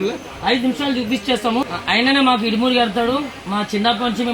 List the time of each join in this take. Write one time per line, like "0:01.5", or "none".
0:01.7